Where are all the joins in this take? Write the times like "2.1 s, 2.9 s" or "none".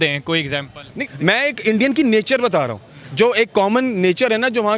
1.0 s